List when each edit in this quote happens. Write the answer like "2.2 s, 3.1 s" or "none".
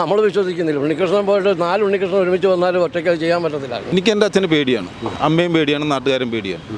3.9 s